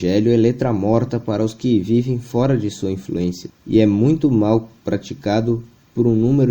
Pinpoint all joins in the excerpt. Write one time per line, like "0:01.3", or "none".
0:03.5